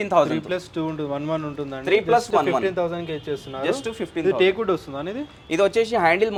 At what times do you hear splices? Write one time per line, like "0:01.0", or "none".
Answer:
none